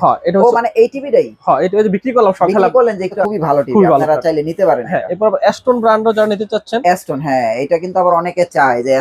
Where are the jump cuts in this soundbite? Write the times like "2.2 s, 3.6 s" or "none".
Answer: 3.2 s